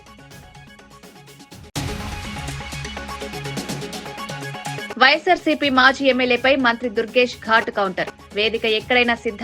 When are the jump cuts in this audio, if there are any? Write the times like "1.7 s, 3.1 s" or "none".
4.9 s